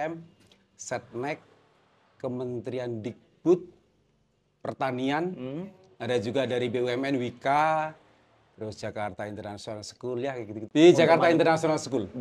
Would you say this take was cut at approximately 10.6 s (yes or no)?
yes